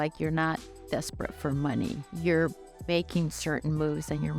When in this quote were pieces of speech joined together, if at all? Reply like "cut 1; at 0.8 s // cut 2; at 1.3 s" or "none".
cut 1; at 2.1 s